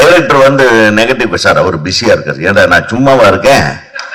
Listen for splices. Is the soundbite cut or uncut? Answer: uncut